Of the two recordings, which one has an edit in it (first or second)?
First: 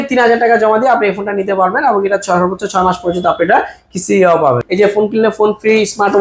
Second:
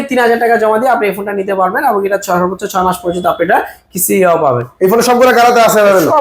first